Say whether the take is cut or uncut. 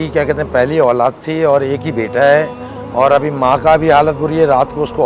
uncut